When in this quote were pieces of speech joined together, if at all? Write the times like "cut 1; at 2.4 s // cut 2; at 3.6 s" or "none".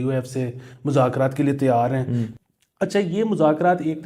cut 1; at 2.3 s